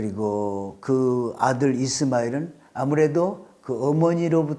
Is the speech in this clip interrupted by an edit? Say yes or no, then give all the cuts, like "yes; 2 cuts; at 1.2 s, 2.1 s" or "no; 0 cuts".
no; 0 cuts